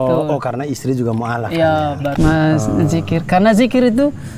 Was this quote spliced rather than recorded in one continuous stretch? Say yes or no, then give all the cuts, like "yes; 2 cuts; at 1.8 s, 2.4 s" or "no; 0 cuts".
yes; 1 cut; at 2.1 s